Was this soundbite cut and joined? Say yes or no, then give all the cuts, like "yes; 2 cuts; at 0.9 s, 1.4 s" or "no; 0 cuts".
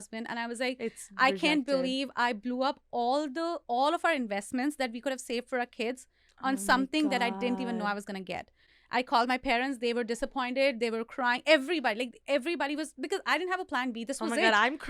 no; 0 cuts